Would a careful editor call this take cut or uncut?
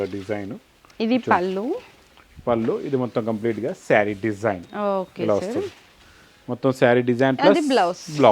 uncut